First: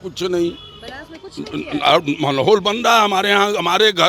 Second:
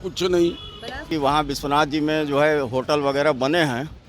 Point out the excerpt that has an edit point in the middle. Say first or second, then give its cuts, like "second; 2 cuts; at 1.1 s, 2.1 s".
second; 1 cut; at 1.1 s